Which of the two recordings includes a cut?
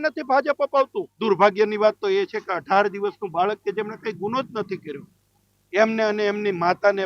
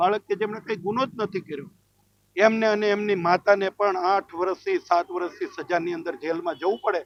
first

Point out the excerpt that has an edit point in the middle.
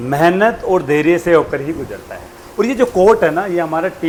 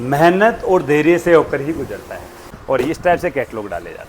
second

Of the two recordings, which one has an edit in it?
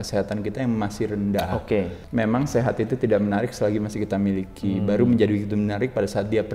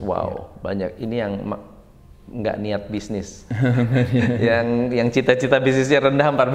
first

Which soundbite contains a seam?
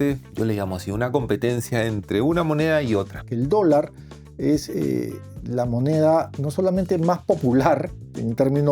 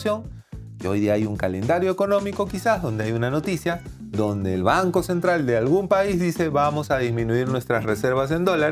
first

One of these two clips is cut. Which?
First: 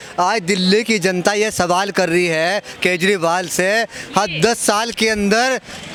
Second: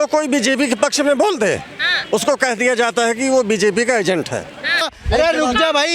second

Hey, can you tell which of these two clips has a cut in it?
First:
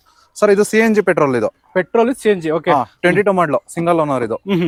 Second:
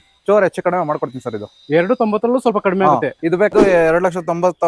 second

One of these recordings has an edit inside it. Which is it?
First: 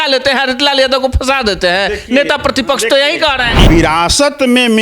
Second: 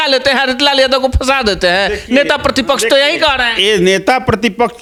first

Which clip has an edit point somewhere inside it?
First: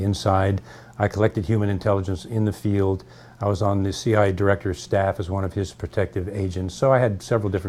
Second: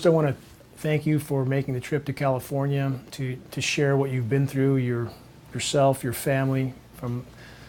first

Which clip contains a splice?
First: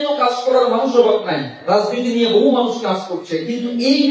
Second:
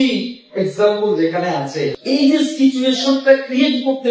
second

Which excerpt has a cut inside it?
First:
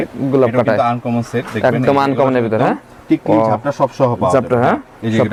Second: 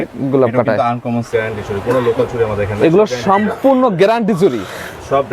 second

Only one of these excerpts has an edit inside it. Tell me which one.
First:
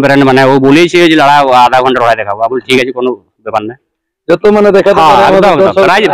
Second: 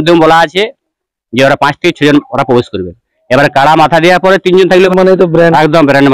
second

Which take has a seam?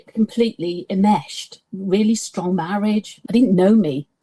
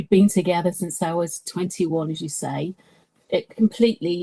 first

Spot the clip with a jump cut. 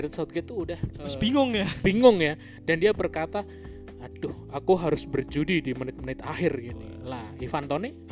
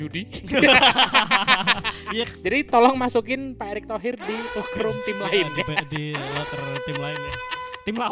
second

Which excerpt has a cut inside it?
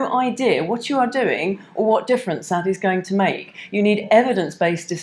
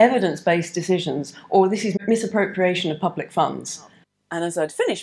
second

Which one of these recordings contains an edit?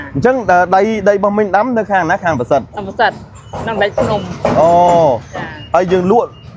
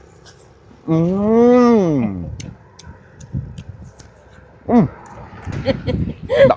second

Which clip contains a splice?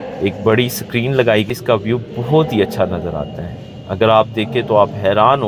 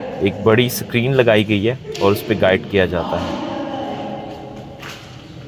first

